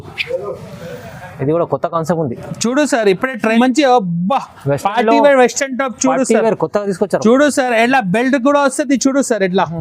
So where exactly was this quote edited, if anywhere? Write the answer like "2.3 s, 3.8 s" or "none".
3.6 s